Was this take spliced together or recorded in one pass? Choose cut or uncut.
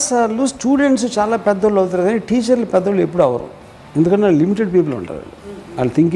uncut